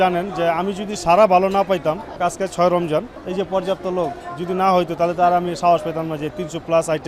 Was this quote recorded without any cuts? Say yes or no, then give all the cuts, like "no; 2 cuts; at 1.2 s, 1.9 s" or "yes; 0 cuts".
no; 2 cuts; at 2.2 s, 3.2 s